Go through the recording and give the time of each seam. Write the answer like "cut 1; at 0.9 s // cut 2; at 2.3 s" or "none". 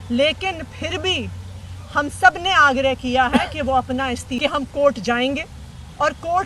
cut 1; at 4.3 s